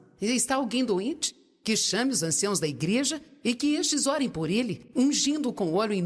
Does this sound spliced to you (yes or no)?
no